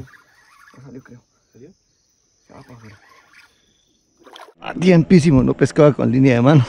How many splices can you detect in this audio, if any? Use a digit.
1